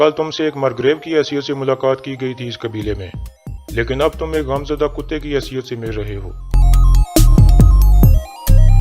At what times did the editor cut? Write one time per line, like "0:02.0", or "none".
0:07.8